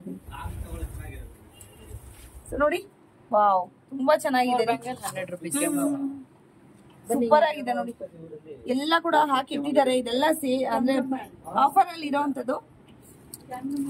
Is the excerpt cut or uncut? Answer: uncut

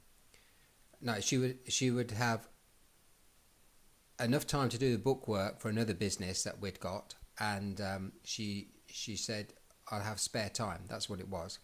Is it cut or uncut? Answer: uncut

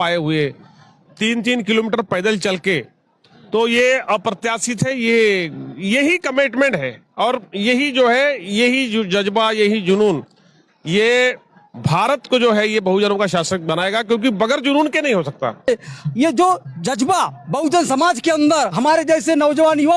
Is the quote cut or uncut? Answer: cut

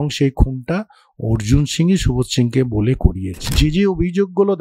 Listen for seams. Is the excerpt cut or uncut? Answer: cut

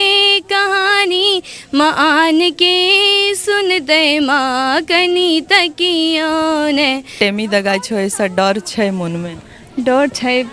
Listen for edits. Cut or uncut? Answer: cut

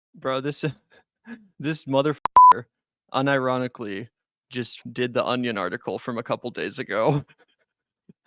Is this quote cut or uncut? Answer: cut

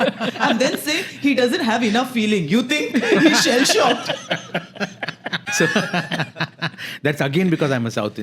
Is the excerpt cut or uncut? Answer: cut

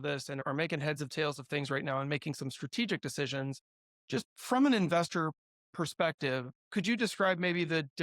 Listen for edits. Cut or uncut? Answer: cut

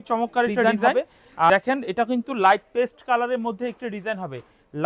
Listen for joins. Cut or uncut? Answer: cut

